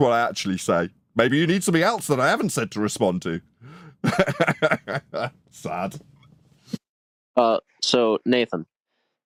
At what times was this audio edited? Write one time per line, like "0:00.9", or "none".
none